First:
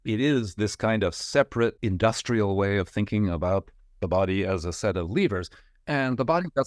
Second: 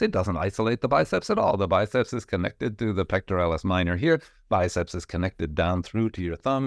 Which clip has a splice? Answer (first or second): first